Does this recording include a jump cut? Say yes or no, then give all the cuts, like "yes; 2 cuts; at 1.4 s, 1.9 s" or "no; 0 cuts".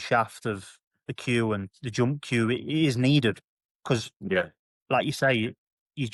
no; 0 cuts